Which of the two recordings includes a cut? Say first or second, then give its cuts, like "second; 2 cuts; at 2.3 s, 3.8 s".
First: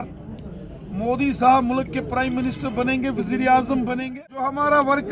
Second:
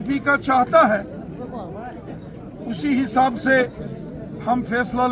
first; 1 cut; at 4.0 s